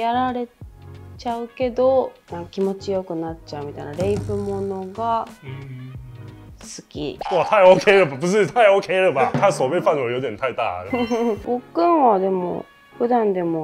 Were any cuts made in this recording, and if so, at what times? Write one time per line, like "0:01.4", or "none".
0:07.2
0:11.4